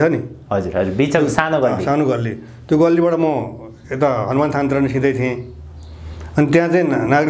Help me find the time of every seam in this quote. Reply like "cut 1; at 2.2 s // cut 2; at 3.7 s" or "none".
none